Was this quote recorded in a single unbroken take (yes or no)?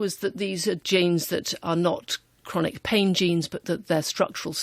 yes